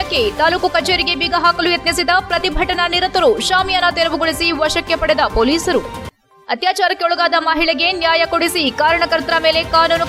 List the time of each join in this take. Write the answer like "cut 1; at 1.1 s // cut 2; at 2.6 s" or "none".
none